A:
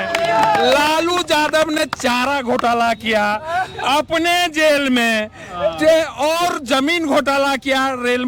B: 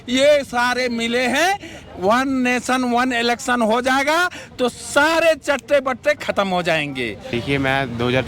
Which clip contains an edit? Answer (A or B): B